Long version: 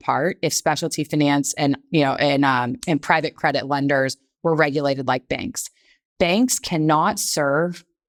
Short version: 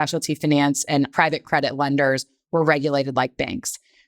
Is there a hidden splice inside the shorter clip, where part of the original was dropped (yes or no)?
yes